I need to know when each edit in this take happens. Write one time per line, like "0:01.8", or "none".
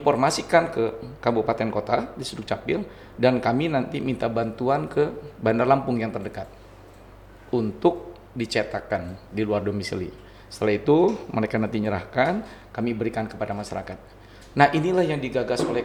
none